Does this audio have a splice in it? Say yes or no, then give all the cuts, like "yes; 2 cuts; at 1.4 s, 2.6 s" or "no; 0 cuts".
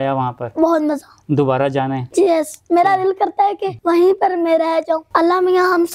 yes; 3 cuts; at 2.0 s, 3.7 s, 5.0 s